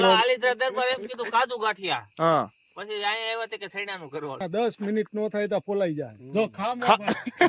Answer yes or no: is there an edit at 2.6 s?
no